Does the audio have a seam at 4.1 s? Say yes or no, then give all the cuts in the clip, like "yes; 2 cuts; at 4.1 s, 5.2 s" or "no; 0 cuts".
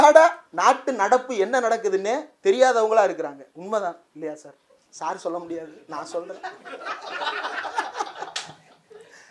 yes; 2 cuts; at 3.5 s, 4.1 s